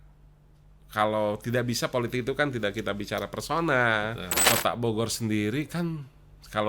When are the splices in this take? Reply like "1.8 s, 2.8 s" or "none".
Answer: 4.4 s